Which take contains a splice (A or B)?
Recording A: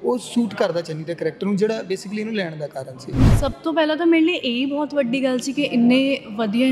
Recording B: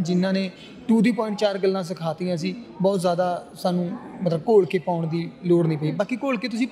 A